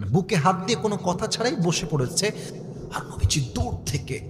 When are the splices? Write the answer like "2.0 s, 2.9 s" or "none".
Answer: 2.6 s